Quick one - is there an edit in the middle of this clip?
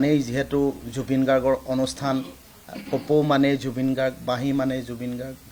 no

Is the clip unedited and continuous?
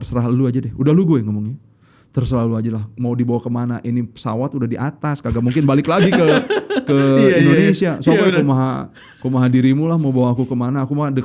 yes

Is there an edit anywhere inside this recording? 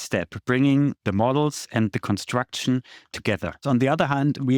yes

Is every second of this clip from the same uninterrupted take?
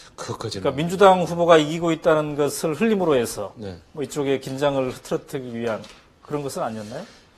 no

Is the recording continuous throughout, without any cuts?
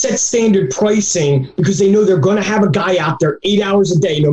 yes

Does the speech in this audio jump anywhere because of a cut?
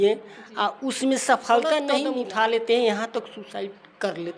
yes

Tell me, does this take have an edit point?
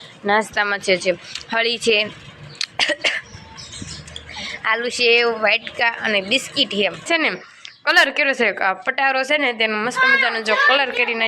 yes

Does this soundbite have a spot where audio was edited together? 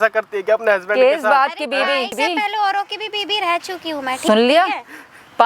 yes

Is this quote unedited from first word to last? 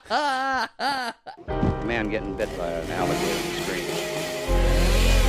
no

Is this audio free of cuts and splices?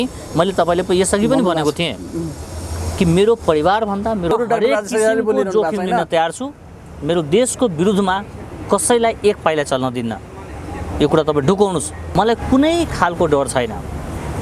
no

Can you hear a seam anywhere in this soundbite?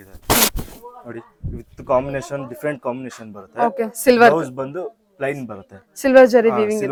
no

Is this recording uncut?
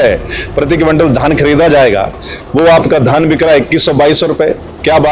yes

